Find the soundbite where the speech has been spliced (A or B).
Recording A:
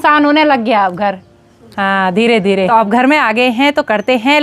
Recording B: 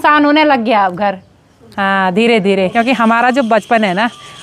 B